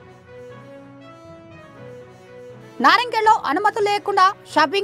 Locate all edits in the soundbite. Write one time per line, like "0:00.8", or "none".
none